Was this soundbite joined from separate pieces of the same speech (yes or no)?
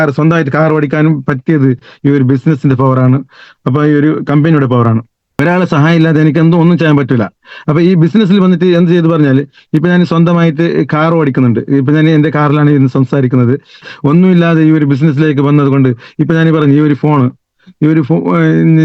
yes